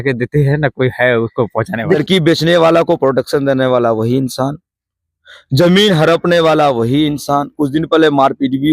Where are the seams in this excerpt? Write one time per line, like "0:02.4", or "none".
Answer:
0:02.0